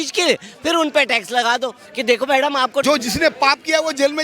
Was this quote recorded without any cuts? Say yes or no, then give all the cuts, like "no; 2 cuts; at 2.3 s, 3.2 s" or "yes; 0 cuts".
no; 1 cut; at 2.8 s